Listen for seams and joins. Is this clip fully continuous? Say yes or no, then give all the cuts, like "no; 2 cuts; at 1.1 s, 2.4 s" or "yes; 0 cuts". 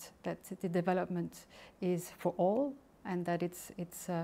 yes; 0 cuts